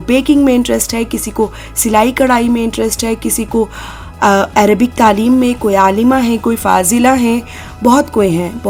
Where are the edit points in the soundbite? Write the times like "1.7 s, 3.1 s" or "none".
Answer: none